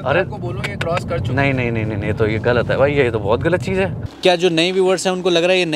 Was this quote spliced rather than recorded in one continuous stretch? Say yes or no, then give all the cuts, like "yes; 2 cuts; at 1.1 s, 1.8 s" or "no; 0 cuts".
yes; 1 cut; at 4.0 s